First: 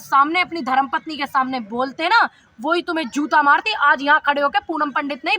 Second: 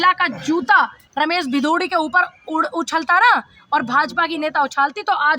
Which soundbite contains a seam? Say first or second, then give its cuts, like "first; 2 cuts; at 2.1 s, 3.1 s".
second; 1 cut; at 1.0 s